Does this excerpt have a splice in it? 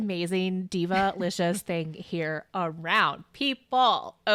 no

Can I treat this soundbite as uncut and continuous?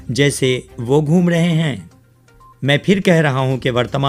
yes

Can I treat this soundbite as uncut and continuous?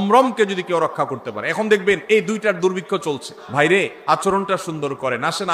no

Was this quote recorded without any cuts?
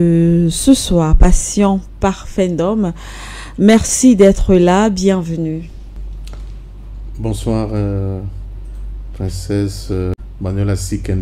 no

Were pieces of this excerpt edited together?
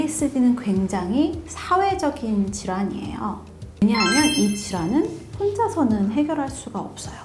no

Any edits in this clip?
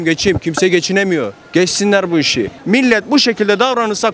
yes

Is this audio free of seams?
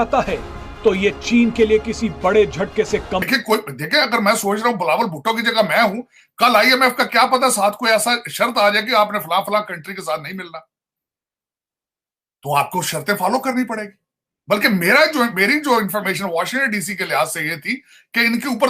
yes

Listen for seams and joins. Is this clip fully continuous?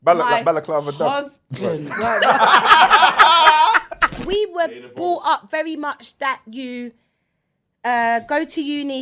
no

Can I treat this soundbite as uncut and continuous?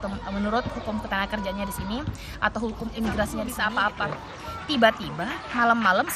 no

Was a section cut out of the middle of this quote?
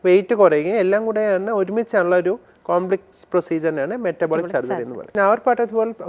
yes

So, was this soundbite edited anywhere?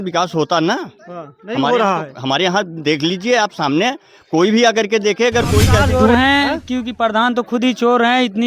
yes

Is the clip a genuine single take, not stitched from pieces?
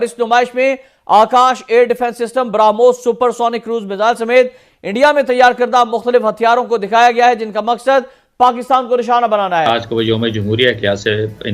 no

